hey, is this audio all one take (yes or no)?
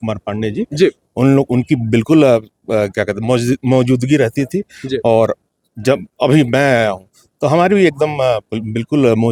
yes